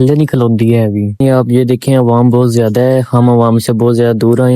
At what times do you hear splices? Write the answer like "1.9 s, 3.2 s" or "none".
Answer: 1.2 s

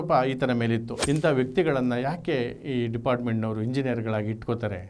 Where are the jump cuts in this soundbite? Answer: 0.9 s

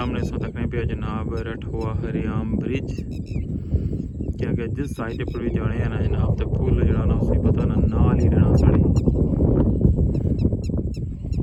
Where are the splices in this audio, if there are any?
none

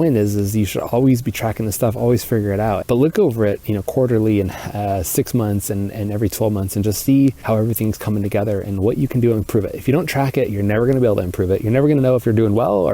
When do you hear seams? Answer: 2.8 s, 7.4 s

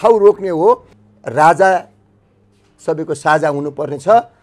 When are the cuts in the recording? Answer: 0.9 s

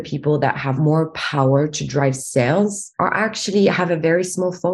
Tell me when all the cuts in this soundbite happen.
0.8 s, 2.8 s

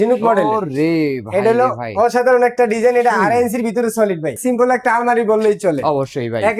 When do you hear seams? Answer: 4.4 s

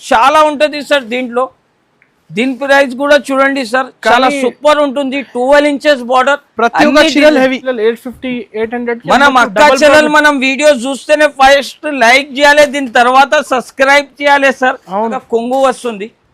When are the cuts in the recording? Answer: 7.6 s, 15.2 s

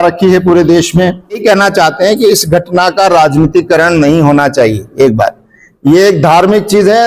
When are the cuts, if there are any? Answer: 1.4 s

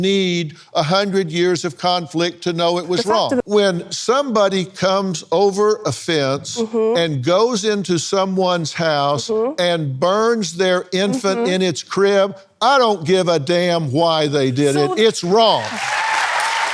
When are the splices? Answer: 3.4 s

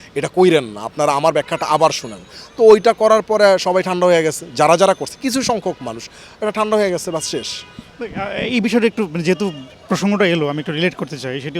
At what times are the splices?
none

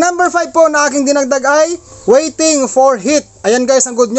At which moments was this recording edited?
1.9 s

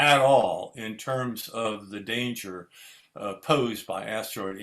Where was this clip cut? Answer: none

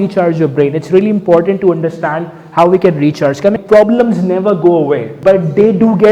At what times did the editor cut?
3.6 s, 5.1 s

